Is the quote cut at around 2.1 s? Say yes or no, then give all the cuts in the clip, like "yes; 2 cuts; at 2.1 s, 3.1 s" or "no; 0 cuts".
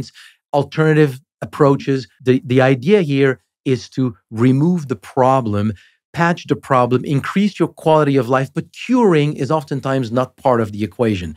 yes; 1 cut; at 2.1 s